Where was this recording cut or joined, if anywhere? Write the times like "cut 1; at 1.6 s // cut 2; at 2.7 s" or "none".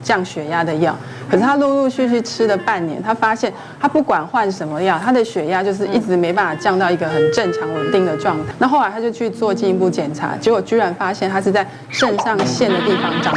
cut 1; at 8.5 s

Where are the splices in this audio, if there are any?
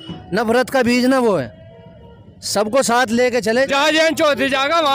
cut 1; at 3.7 s

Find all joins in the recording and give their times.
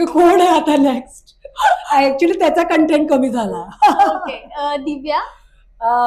none

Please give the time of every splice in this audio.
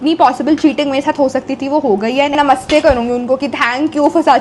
cut 1; at 2.3 s

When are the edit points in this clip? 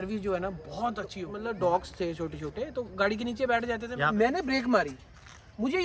cut 1; at 1.3 s // cut 2; at 3.8 s

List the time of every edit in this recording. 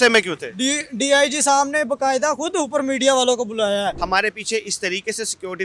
cut 1; at 4.0 s

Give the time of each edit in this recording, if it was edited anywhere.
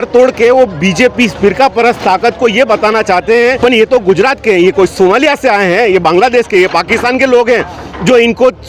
cut 1; at 3.6 s

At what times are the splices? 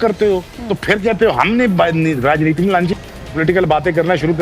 cut 1; at 2.9 s

